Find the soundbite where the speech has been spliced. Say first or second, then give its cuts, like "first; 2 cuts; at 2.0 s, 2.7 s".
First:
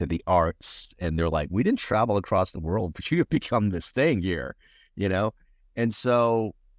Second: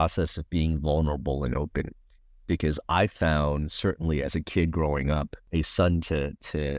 second; 1 cut; at 5.5 s